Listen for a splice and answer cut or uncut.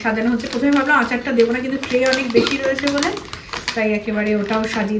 uncut